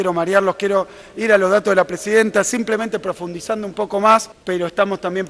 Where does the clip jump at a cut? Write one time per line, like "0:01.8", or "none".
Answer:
0:04.3

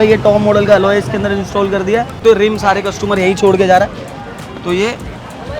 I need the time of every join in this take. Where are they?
0:02.2

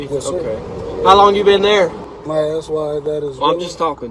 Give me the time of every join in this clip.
0:02.1

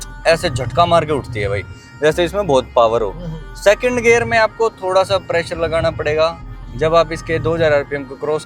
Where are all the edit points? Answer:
0:06.5

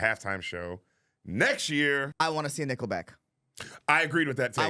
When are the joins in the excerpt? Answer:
0:02.1

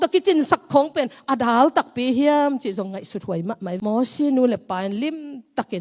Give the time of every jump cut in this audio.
0:03.8

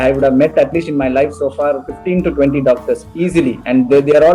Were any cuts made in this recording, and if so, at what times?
none

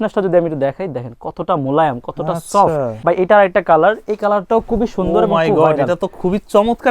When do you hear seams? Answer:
0:02.9

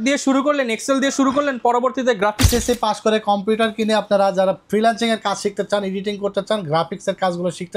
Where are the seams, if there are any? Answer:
0:02.5

